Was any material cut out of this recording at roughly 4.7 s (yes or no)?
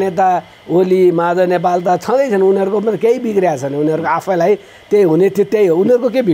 no